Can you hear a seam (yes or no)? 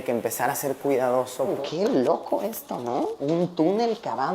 yes